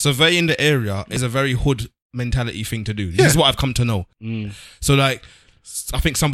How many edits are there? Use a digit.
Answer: 2